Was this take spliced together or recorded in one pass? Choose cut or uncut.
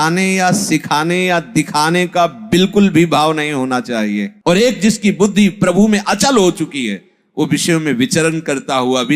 cut